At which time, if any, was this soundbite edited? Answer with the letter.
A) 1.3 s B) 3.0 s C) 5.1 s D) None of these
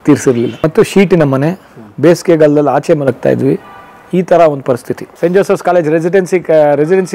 C